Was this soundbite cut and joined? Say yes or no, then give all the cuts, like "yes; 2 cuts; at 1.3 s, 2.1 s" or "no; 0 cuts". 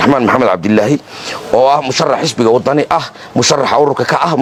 no; 0 cuts